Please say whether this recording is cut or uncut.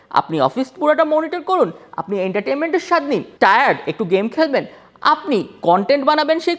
cut